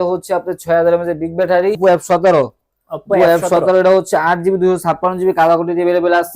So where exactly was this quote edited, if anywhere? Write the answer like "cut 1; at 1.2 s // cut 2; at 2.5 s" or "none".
cut 1; at 1.8 s